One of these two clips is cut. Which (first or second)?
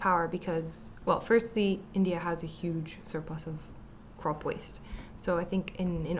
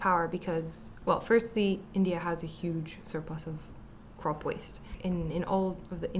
second